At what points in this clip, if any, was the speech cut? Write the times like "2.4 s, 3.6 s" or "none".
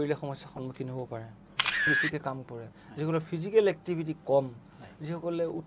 1.9 s